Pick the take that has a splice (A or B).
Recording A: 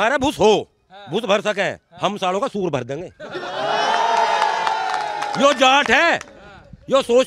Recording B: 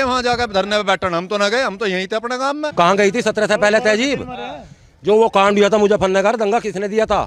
B